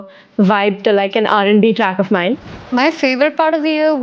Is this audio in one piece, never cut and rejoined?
no; 1 cut; at 2.5 s

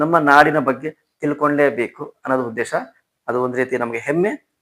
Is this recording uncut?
yes; 0 cuts

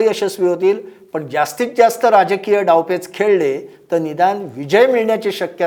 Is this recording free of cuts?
yes; 0 cuts

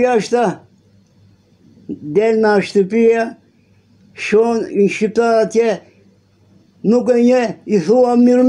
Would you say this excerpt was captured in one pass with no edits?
yes; 0 cuts

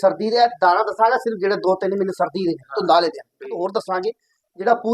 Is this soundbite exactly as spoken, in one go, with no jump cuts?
no; 1 cut; at 3.6 s

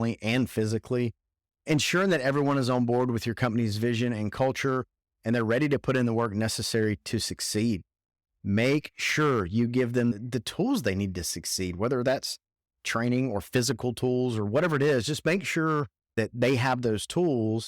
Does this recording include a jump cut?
yes; 1 cut; at 16.0 s

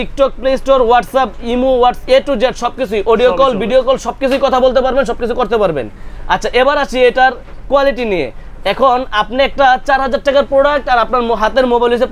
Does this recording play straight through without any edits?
yes; 0 cuts

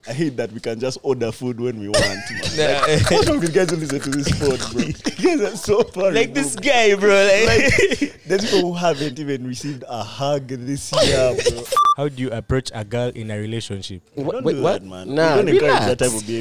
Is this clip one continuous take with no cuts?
no; 3 cuts; at 5.0 s, 11.8 s, 14.2 s

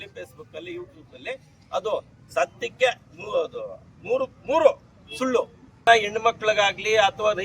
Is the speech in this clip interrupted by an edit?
yes; 1 cut; at 5.9 s

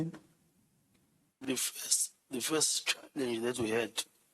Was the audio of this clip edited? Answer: yes; 1 cut; at 1.3 s

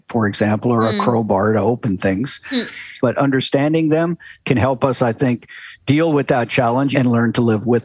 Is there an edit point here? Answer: yes; 2 cuts; at 2.9 s, 6.9 s

